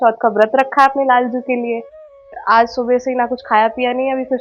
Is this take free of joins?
no; 1 cut; at 2.3 s

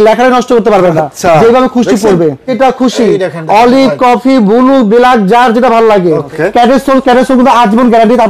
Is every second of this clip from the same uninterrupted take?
no; 2 cuts; at 2.5 s, 6.3 s

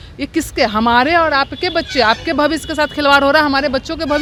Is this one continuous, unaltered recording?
yes; 0 cuts

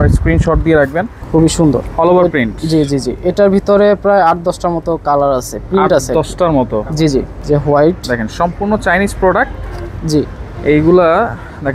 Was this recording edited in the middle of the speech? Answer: yes; 2 cuts; at 1.2 s, 7.3 s

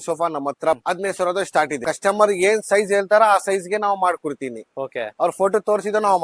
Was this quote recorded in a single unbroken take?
no; 2 cuts; at 0.8 s, 1.8 s

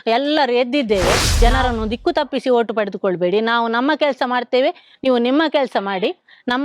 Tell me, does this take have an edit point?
yes; 1 cut; at 1.3 s

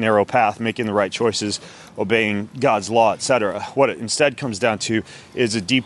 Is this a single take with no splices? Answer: yes; 0 cuts

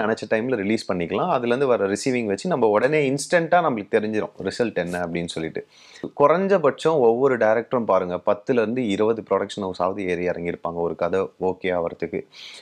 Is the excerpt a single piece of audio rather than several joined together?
no; 1 cut; at 6.1 s

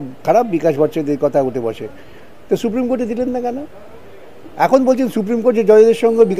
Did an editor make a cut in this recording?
no; 0 cuts

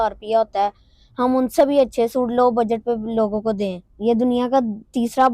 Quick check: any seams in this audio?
yes; 1 cut; at 3.8 s

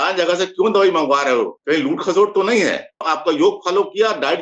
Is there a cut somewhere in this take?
yes; 2 cuts; at 1.6 s, 3.0 s

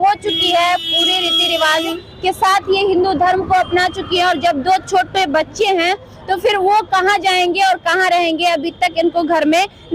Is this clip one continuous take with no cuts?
yes; 0 cuts

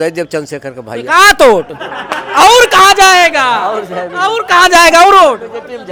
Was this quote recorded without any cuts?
yes; 0 cuts

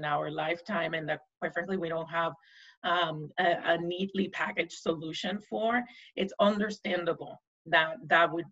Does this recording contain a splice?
no; 0 cuts

